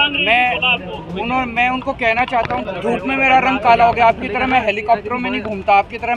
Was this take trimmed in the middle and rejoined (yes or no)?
yes